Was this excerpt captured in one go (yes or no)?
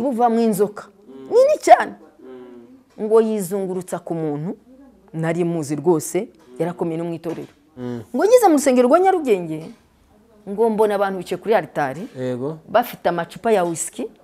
no